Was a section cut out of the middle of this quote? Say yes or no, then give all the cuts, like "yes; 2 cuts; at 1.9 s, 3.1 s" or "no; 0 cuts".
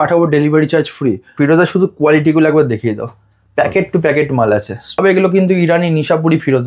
yes; 2 cuts; at 1.3 s, 5.0 s